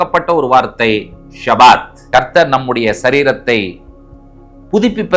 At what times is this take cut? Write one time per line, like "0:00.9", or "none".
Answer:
0:01.9